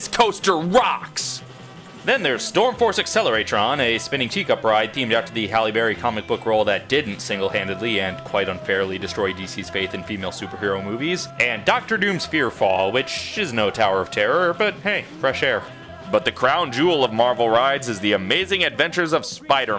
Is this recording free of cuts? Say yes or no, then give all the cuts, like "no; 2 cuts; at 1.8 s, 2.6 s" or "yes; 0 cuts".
no; 1 cut; at 13.4 s